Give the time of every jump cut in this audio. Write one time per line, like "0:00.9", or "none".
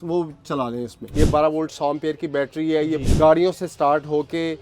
0:01.0
0:03.0